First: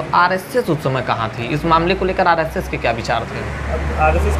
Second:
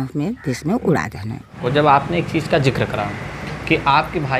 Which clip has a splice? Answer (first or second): second